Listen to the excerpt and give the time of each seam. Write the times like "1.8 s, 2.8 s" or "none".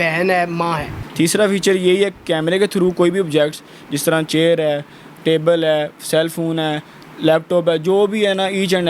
1.0 s